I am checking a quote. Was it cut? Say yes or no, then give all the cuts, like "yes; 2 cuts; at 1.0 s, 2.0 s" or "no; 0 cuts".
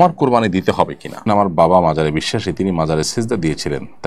yes; 1 cut; at 1.3 s